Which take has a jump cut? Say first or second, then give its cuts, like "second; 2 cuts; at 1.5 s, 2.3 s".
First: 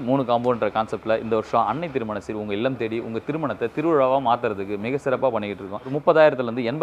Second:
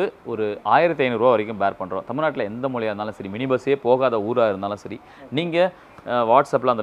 first; 1 cut; at 5.9 s